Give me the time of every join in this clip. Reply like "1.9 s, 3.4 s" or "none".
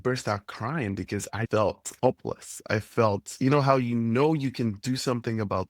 1.9 s